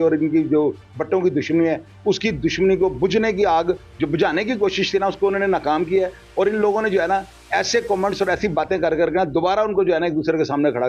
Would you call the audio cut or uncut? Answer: uncut